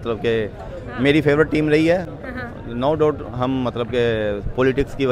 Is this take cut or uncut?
uncut